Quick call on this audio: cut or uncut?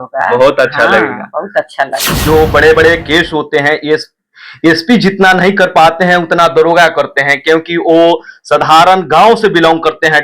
cut